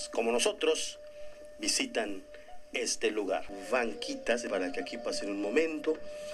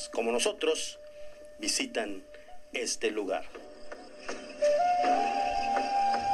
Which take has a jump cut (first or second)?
first